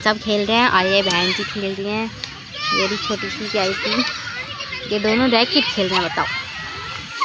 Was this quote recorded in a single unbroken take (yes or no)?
yes